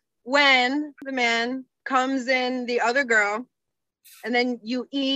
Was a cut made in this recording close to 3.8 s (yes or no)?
no